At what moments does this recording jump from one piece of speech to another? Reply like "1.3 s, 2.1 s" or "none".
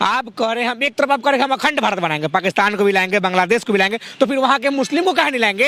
none